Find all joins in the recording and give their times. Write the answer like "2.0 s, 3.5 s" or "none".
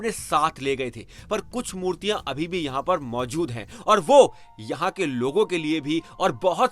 none